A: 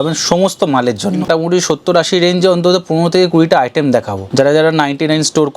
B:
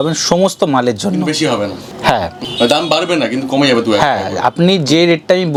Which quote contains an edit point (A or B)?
A